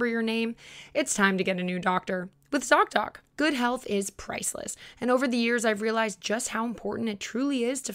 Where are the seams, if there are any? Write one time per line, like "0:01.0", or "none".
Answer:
0:03.2